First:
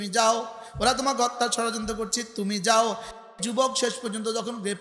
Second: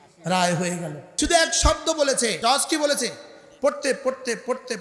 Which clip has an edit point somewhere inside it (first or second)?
second